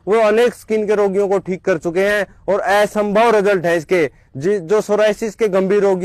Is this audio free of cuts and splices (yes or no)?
yes